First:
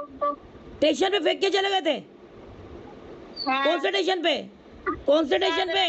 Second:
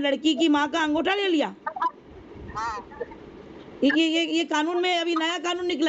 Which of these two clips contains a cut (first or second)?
first